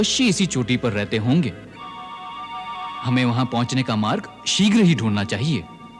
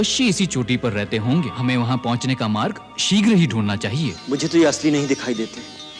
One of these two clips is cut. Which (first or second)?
second